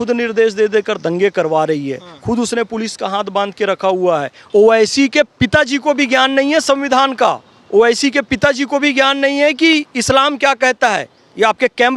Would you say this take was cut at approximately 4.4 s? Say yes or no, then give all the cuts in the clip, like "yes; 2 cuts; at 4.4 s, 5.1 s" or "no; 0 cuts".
yes; 1 cut; at 4.4 s